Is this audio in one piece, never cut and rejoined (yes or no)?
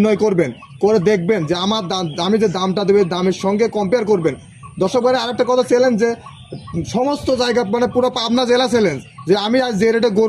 yes